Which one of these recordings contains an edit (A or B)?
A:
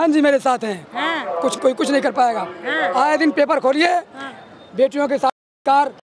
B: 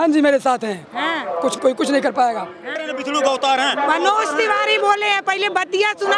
B